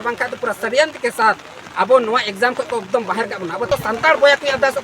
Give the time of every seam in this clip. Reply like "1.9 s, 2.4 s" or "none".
3.7 s